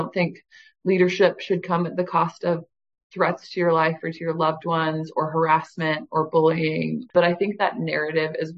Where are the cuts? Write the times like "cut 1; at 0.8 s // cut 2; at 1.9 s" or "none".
cut 1; at 7.1 s